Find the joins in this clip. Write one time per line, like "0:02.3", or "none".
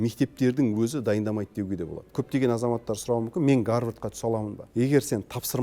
0:02.2
0:04.6